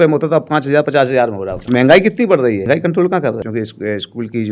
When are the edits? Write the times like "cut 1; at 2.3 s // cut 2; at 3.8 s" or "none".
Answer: cut 1; at 1.5 s // cut 2; at 2.6 s // cut 3; at 3.4 s